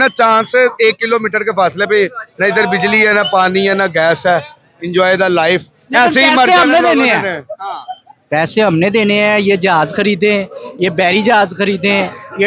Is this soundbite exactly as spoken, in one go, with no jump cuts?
yes; 0 cuts

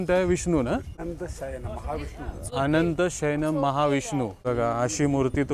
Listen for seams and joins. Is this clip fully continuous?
no; 2 cuts; at 1.0 s, 4.4 s

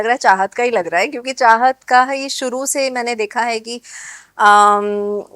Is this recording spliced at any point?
no; 0 cuts

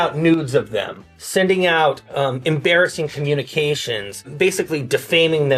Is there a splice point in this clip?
no; 0 cuts

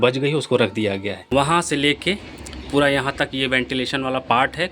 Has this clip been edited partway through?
yes; 1 cut; at 1.2 s

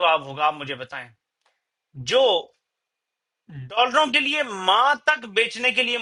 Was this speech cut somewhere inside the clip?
no; 0 cuts

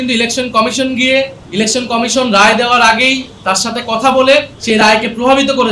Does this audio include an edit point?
yes; 2 cuts; at 1.4 s, 4.6 s

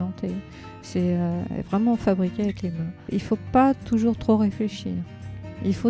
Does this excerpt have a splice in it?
yes; 1 cut; at 3.1 s

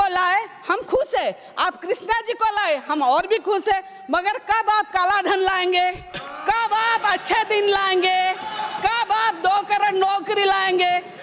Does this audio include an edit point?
no; 0 cuts

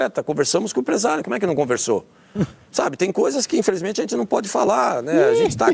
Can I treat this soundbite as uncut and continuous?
yes; 0 cuts

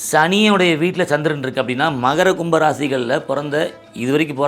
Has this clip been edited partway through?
no; 0 cuts

